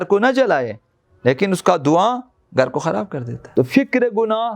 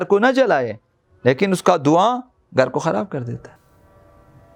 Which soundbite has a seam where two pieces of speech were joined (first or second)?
first